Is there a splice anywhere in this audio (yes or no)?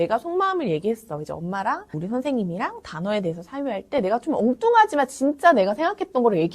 no